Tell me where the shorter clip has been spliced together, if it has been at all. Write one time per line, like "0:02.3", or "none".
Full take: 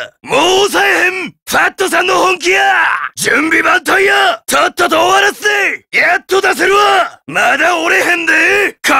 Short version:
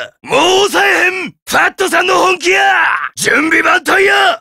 none